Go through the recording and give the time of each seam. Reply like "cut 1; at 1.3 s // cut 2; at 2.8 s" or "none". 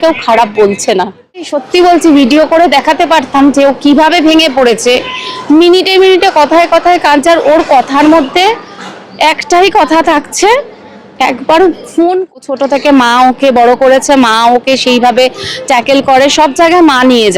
cut 1; at 1.6 s // cut 2; at 12.4 s